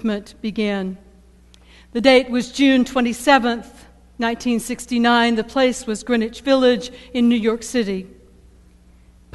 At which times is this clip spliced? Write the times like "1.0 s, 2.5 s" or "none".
3.6 s